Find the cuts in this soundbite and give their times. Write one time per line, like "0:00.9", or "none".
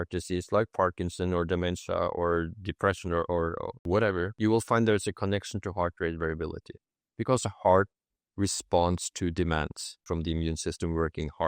0:03.7
0:04.3
0:10.1

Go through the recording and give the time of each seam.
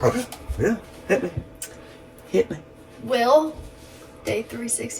none

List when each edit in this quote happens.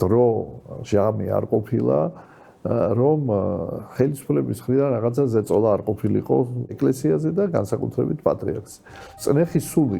0:06.8
0:09.1

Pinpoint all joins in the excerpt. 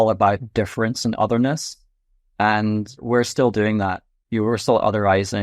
0:03.0

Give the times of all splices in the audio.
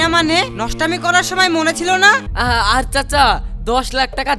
0:02.3

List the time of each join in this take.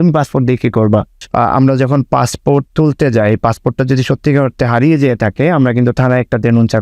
0:01.2

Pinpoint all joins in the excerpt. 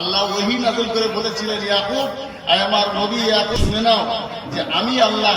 0:03.6

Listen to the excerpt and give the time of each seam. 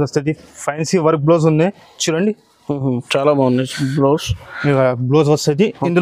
none

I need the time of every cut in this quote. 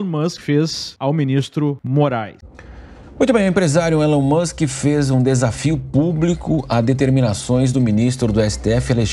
0:02.4

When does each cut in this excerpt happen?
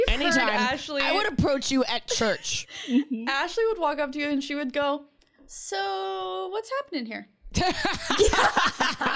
none

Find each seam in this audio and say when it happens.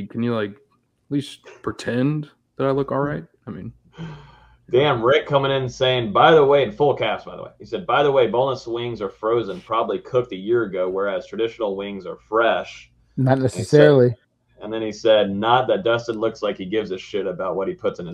none

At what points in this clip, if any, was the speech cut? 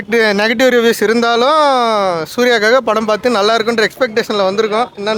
none

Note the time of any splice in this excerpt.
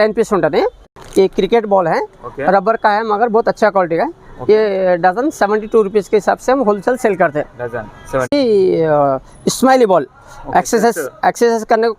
0:00.9
0:08.3

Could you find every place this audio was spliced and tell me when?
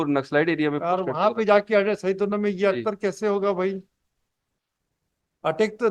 none

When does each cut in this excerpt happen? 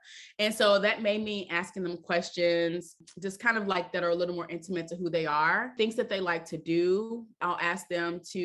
0:03.0
0:05.7
0:07.4

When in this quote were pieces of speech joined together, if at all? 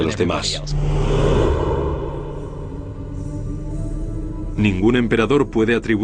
none

